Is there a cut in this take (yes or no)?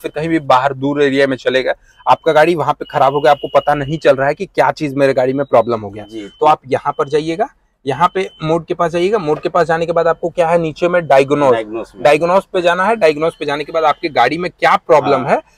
no